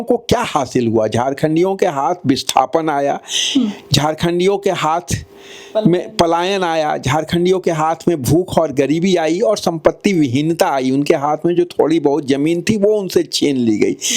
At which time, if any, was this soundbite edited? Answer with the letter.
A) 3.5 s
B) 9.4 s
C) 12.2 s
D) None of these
D